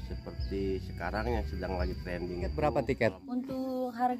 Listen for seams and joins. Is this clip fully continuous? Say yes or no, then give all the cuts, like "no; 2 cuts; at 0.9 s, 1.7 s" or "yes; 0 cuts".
no; 1 cut; at 2.8 s